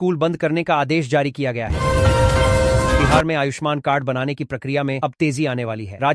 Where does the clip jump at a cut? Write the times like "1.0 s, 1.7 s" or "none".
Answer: 1.7 s, 3.1 s